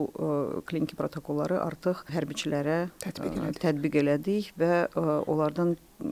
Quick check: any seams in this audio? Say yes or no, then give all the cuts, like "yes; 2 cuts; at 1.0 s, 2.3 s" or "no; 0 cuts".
yes; 1 cut; at 2.1 s